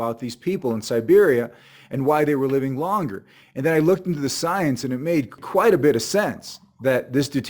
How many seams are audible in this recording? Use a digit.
1